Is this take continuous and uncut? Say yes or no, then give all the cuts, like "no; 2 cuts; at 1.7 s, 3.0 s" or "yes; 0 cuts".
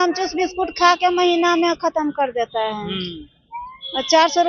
yes; 0 cuts